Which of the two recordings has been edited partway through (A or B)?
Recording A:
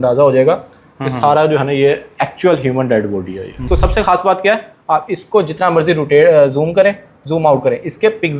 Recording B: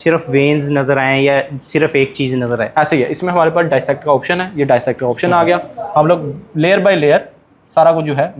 A